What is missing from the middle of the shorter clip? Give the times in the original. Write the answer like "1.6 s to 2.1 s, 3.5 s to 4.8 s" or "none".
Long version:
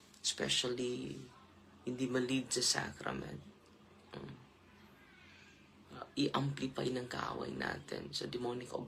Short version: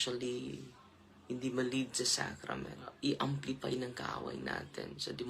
3.4 s to 6.0 s